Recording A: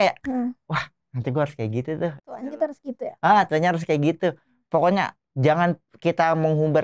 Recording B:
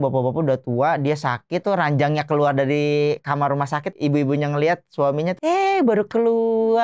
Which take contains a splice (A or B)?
B